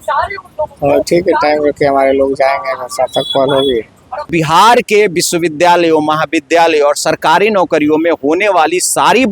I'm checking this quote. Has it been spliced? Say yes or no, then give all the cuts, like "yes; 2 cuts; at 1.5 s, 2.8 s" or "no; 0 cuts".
yes; 1 cut; at 4.3 s